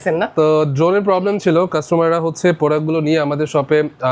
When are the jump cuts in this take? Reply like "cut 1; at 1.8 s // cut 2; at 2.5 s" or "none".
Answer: none